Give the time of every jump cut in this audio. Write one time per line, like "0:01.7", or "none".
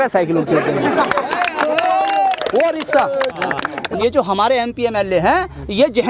0:03.8

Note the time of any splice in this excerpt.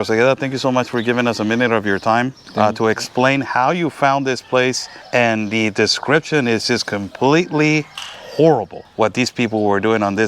0:02.4
0:04.9
0:08.8

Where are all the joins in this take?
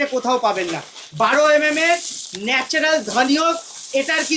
none

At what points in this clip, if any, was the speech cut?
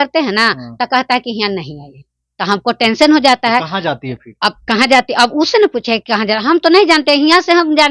none

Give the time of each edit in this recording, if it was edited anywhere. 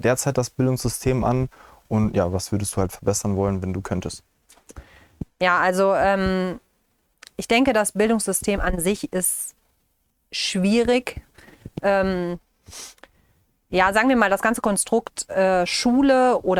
none

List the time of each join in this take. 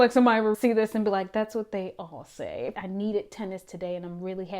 0:02.7

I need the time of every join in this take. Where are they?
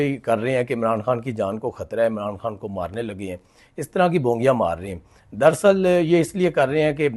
none

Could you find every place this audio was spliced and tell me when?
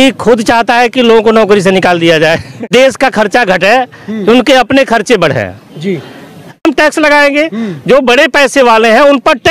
0:02.7
0:06.6

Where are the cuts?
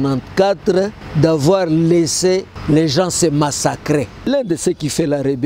0:01.0
0:02.5
0:04.3

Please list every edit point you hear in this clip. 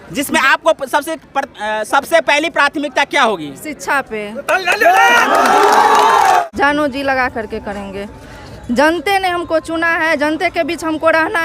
0:06.4

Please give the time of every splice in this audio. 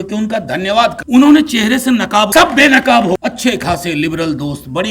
0:01.0
0:02.3
0:03.2

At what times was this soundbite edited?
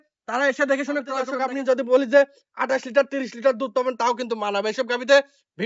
0:01.4

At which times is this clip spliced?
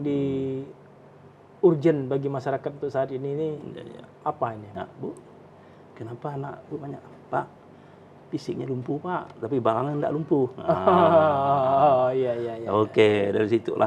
0:04.7

